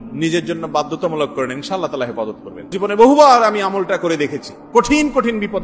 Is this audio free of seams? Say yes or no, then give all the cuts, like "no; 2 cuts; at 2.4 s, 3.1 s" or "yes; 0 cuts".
no; 1 cut; at 2.7 s